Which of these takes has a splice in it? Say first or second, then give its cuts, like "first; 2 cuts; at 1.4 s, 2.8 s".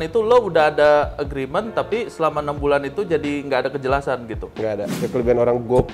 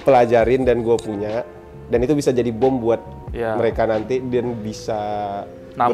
first; 1 cut; at 4.9 s